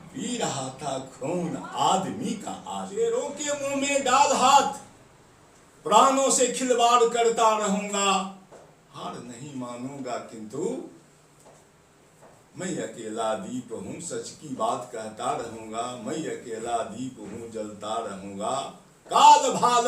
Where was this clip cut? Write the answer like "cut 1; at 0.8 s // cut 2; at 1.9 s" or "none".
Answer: cut 1; at 2.9 s